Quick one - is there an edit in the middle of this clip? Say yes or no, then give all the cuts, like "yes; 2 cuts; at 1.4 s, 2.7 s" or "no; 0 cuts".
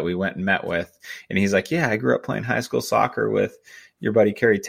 no; 0 cuts